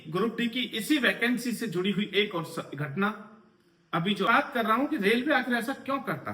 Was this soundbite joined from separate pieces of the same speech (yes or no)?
yes